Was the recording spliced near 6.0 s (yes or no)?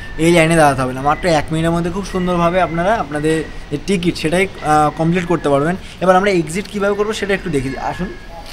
no